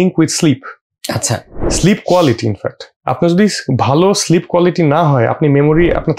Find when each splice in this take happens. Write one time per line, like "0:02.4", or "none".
none